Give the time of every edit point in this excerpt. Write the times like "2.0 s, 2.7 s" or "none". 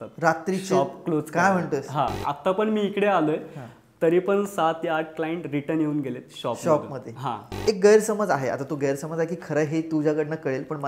2.1 s, 7.5 s